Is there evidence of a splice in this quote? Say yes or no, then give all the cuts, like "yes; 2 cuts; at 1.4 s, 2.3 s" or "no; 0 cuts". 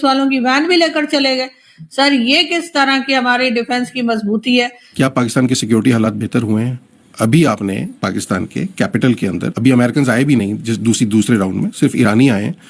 yes; 1 cut; at 4.8 s